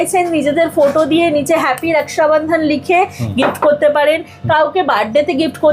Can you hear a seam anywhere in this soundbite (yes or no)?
no